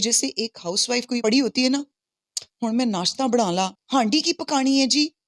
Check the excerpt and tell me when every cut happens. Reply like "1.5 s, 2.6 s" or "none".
1.2 s, 3.8 s